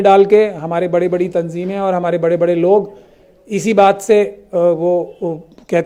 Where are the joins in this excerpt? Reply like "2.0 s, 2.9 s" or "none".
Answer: none